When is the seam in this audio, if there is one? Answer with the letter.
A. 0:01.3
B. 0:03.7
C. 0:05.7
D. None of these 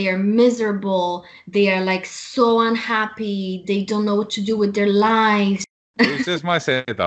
C